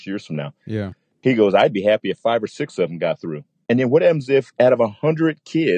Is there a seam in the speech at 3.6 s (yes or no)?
yes